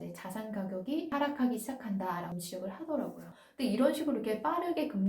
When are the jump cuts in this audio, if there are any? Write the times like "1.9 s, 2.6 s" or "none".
3.3 s